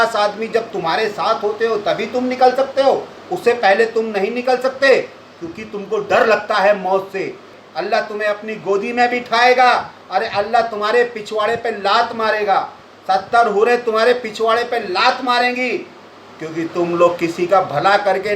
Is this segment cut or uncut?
cut